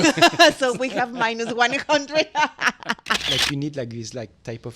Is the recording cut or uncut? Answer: cut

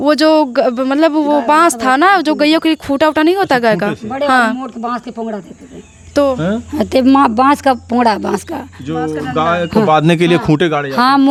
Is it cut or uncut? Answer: uncut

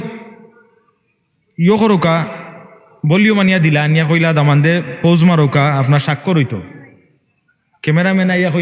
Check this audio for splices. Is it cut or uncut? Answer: uncut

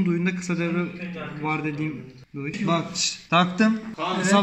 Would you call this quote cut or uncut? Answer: cut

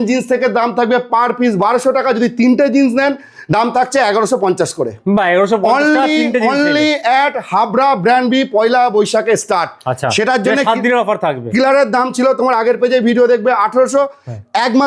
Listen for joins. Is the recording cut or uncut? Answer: uncut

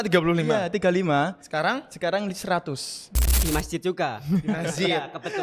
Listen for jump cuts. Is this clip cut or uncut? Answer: cut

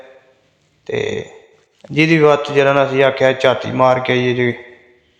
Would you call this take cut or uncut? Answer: uncut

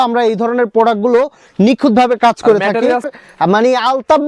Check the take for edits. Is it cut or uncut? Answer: cut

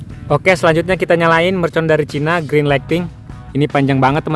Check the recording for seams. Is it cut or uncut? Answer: uncut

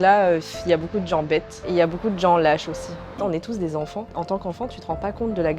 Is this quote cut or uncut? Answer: cut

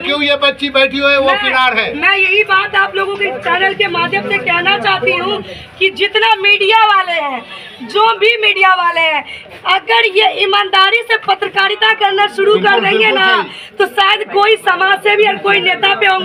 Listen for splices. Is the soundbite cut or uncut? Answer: uncut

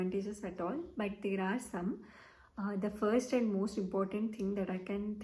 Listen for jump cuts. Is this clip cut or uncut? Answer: uncut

